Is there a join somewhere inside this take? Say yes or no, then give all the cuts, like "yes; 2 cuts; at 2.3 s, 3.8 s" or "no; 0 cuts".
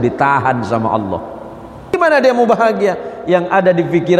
yes; 1 cut; at 1.8 s